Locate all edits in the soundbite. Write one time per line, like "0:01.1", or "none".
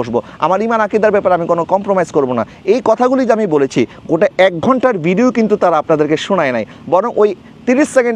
none